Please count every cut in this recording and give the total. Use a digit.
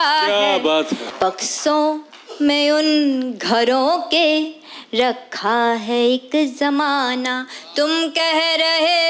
1